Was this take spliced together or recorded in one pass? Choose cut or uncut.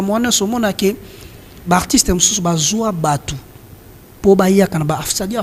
uncut